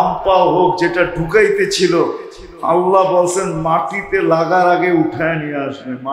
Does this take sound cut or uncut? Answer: uncut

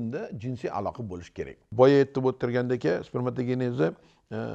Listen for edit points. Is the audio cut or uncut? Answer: cut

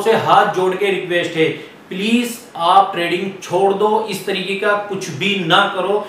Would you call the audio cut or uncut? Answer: uncut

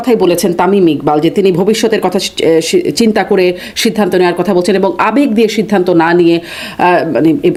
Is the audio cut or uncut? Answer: uncut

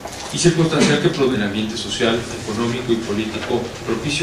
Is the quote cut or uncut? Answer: uncut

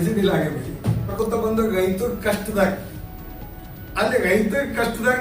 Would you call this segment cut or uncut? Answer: cut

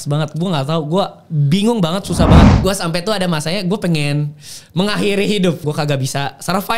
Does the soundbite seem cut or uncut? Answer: cut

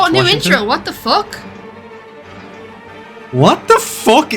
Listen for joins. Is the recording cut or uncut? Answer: cut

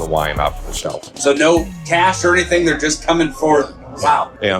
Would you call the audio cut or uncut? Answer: cut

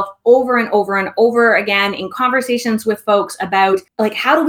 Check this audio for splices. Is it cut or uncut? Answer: uncut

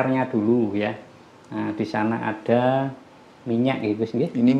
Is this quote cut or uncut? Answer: uncut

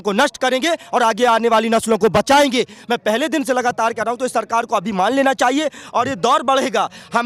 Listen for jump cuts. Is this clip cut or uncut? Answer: uncut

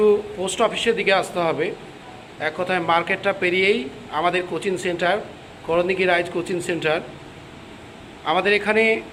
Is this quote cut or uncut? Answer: uncut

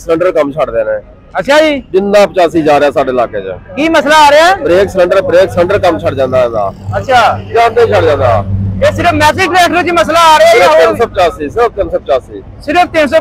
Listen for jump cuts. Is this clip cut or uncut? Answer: uncut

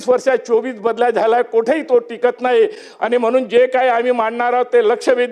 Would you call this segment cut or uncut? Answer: uncut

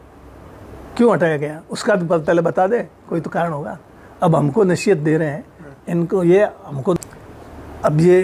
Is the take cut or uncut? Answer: cut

